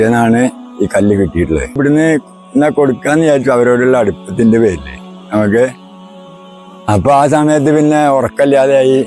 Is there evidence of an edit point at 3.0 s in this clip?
no; 1 cut; at 1.8 s

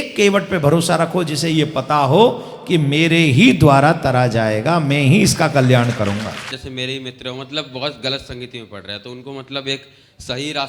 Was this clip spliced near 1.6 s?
no; 1 cut; at 6.5 s

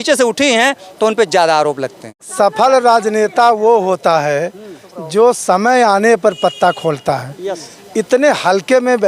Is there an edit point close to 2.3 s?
yes; 1 cut; at 2.3 s

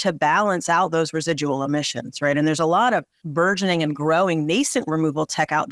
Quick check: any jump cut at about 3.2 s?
yes; 1 cut; at 3.2 s

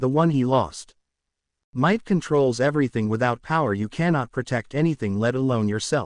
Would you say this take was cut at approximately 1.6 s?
yes; 1 cut; at 1.6 s

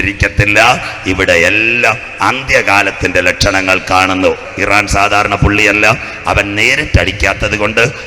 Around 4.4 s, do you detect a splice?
yes; 1 cut; at 4.4 s

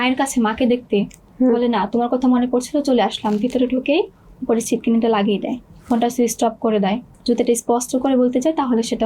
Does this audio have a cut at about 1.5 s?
no; 2 cuts; at 5.6 s, 7.1 s

